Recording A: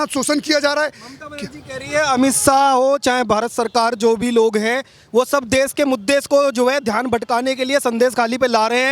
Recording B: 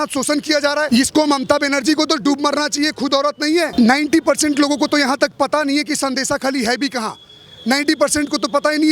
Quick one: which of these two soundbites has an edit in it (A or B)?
B